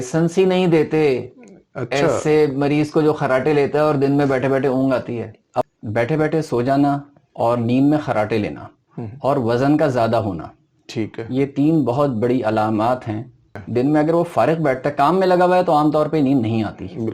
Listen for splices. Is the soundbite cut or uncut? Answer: cut